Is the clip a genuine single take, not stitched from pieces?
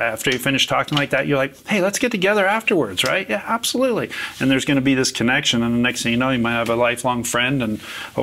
yes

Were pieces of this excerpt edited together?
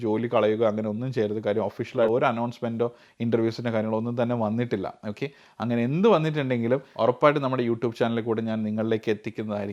no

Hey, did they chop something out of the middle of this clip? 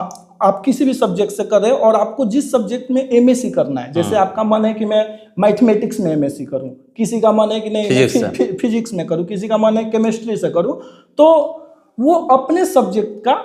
no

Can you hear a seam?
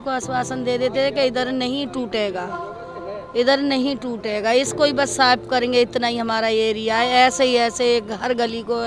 no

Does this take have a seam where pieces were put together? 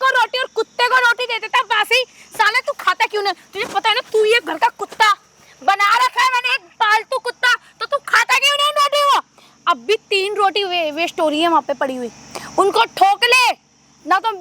no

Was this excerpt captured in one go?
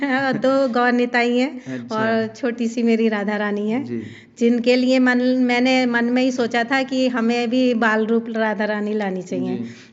yes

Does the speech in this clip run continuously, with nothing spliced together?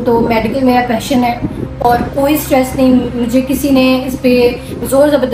yes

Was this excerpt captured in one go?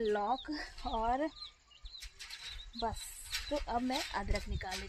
yes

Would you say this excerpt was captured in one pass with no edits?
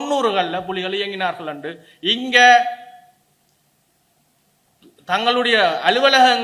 yes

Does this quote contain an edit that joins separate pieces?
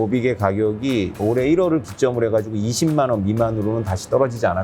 yes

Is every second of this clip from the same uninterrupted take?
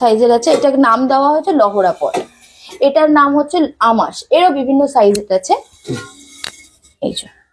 yes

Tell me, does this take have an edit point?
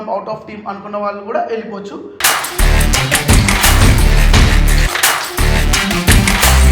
no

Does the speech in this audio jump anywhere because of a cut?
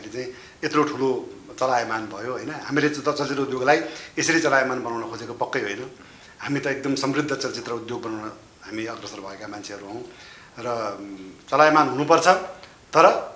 no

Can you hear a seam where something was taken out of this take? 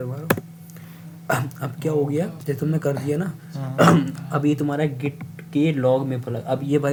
no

